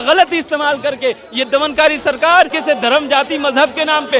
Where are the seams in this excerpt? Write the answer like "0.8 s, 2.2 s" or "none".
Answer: 2.5 s